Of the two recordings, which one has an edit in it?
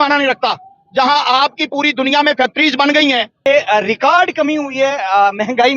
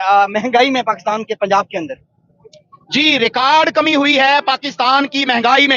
first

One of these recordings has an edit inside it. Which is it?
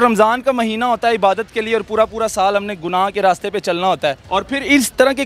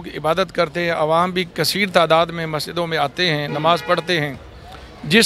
first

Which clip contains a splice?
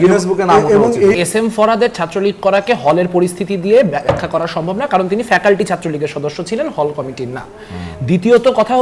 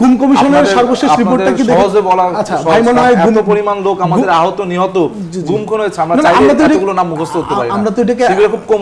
first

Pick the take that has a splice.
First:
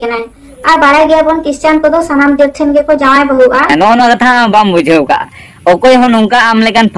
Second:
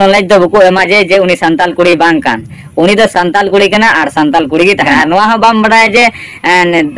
first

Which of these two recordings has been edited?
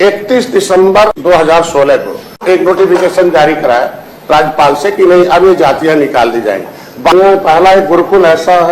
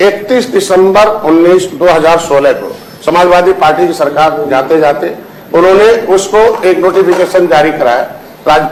first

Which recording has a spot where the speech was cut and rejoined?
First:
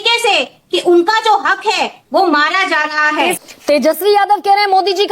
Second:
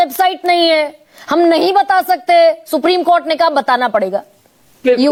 first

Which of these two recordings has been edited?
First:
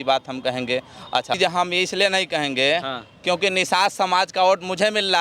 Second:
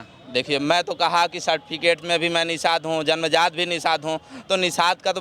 first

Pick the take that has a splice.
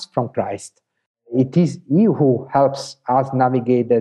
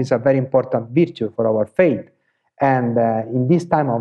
second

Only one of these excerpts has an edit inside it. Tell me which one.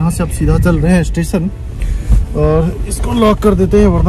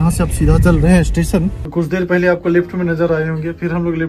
second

